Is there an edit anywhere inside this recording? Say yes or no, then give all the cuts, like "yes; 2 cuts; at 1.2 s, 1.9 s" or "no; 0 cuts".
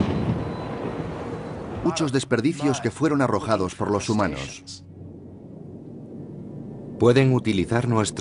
no; 0 cuts